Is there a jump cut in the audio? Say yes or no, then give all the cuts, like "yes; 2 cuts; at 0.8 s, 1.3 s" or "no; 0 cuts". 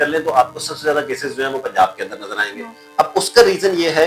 no; 0 cuts